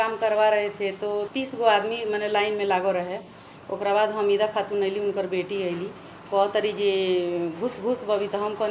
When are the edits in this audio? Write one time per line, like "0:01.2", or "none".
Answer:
0:01.3